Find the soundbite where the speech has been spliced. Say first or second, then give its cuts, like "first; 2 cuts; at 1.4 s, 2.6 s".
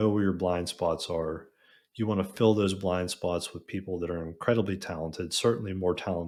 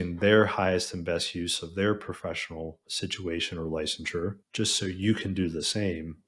second; 2 cuts; at 2.8 s, 4.4 s